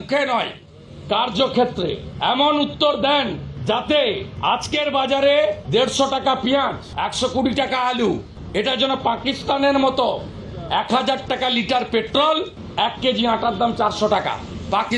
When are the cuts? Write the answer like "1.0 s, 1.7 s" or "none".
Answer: 2.1 s, 3.5 s, 4.3 s, 5.6 s, 6.8 s, 8.3 s, 12.6 s